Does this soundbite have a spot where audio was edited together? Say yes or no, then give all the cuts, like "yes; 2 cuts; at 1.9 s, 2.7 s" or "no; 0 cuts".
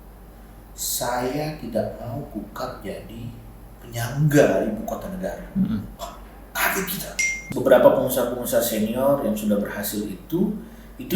yes; 1 cut; at 7.4 s